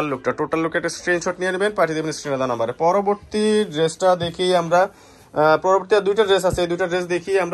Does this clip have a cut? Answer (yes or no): no